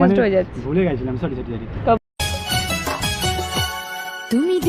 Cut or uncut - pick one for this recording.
cut